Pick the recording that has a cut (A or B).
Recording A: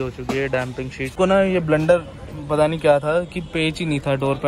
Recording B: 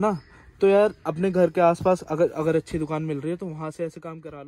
A